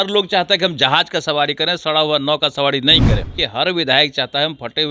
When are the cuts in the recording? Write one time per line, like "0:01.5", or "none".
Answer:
0:03.4